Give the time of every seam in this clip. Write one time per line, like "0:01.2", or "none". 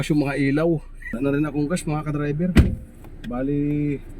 0:01.0